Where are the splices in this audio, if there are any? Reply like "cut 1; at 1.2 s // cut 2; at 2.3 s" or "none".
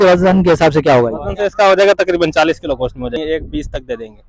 cut 1; at 3.2 s